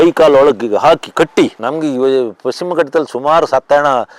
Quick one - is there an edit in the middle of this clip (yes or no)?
yes